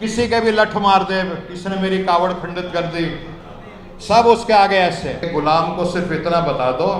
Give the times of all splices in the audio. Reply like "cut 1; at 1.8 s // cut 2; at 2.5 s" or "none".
cut 1; at 5.2 s

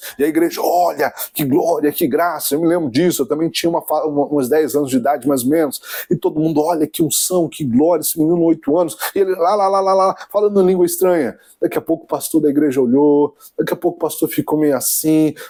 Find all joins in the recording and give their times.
none

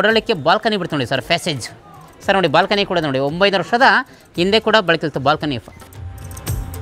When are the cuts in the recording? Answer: cut 1; at 5.7 s

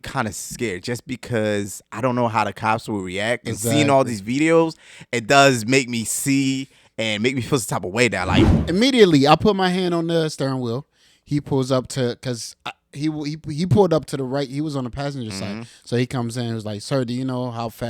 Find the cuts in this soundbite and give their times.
cut 1; at 8.6 s

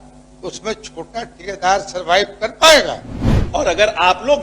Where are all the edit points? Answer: cut 1; at 3.4 s

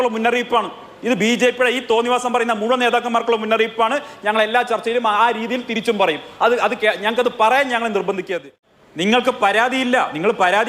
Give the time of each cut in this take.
cut 1; at 8.5 s

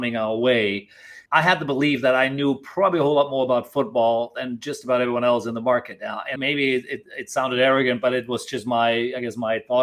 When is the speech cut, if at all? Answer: cut 1; at 1.2 s // cut 2; at 6.3 s

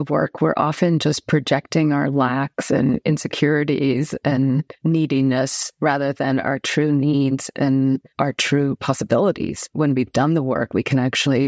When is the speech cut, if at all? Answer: cut 1; at 4.7 s // cut 2; at 8.1 s // cut 3; at 9.7 s

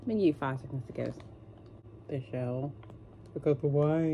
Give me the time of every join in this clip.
cut 1; at 1.9 s

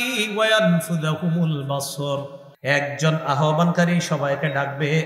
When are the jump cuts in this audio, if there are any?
cut 1; at 2.4 s

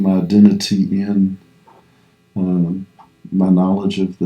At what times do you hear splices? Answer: none

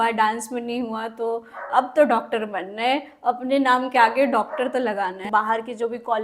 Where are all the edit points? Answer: cut 1; at 5.3 s

